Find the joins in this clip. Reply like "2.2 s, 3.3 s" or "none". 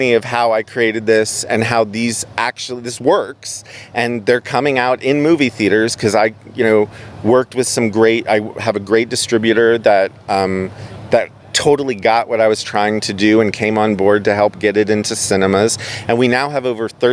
none